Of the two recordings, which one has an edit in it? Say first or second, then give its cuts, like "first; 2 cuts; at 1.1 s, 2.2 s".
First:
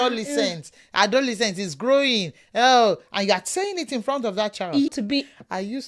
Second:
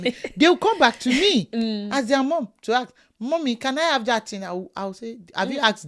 first; 1 cut; at 4.9 s